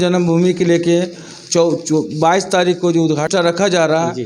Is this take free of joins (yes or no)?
no